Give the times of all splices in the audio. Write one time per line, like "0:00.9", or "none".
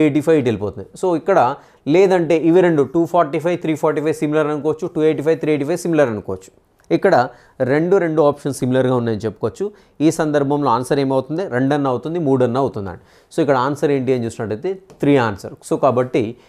none